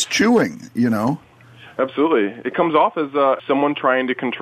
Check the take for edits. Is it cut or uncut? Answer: cut